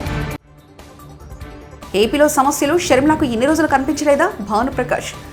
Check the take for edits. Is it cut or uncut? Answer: uncut